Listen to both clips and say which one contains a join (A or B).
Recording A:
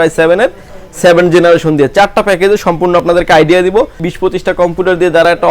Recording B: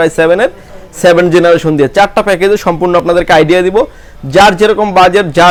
A